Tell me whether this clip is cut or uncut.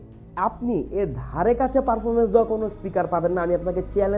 uncut